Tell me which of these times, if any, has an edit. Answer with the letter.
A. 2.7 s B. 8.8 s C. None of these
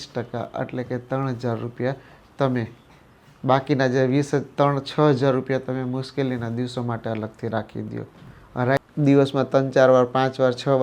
B